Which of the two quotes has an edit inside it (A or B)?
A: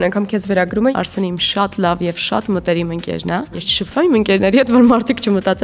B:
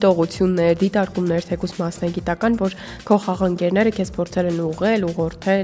A